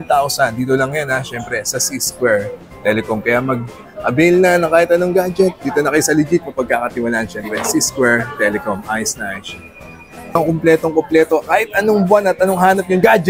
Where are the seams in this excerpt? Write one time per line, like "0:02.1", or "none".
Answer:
0:10.3